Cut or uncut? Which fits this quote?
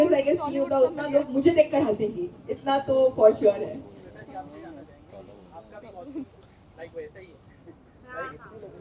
uncut